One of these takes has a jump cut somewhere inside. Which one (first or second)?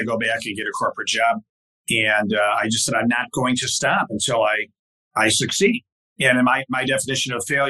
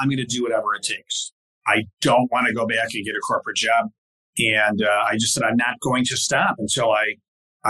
second